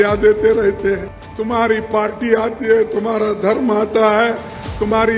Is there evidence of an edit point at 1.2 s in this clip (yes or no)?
yes